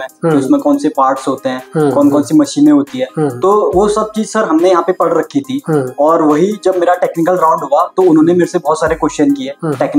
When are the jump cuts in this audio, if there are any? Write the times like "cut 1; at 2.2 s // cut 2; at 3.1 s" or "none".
none